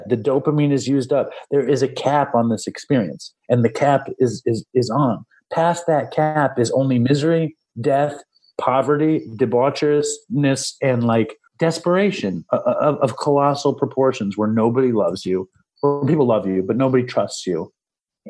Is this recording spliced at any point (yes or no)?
yes